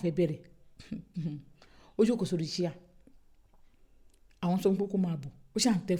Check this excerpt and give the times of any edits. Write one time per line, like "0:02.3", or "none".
none